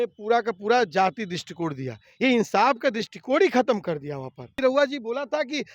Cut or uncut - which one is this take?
cut